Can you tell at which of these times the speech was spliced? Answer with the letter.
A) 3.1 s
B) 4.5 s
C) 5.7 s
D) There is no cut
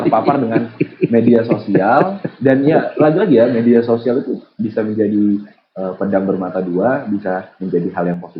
D